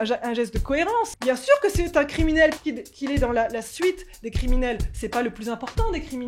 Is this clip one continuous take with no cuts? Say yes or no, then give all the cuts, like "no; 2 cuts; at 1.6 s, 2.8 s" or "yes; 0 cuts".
no; 2 cuts; at 1.1 s, 2.6 s